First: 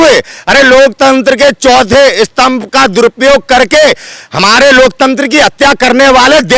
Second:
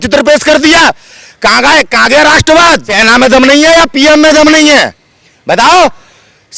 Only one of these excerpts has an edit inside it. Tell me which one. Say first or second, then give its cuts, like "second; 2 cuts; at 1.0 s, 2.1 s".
second; 1 cut; at 2.9 s